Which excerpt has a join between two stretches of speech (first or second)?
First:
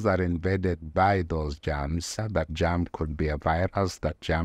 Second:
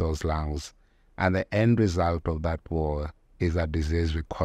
first